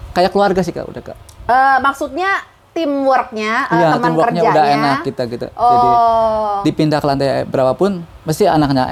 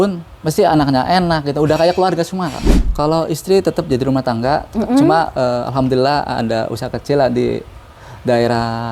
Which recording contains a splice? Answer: second; 1 cut; at 2.7 s

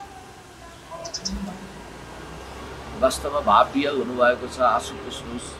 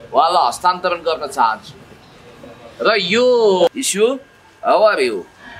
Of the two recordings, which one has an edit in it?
second; 1 cut; at 3.7 s

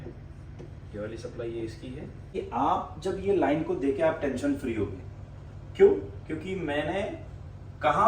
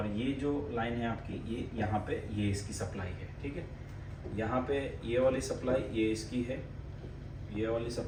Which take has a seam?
first; 1 cut; at 2.3 s

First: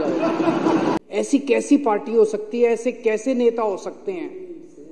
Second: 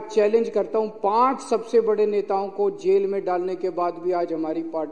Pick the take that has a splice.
first; 1 cut; at 1.0 s

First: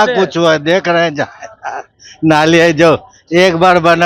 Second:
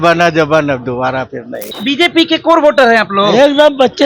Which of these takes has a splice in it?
second; 1 cut; at 1.7 s

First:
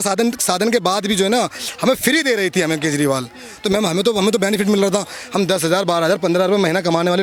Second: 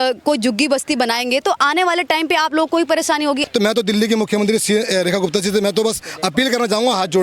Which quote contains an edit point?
second; 1 cut; at 3.4 s

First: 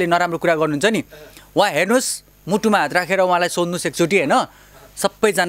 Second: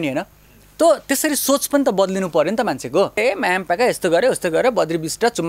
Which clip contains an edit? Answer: second; 1 cut; at 3.2 s

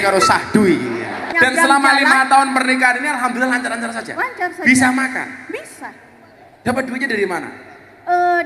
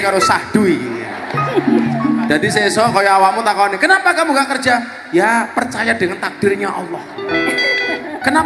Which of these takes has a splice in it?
first; 1 cut; at 1.2 s

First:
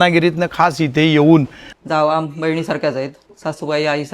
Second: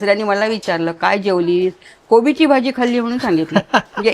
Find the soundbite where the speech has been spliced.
first; 2 cuts; at 1.6 s, 3.3 s

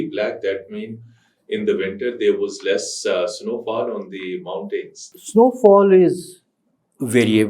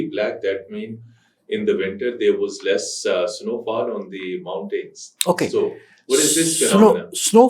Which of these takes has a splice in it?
first; 1 cut; at 5.1 s

